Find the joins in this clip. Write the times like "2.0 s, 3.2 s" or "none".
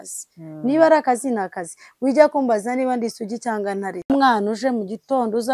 4.1 s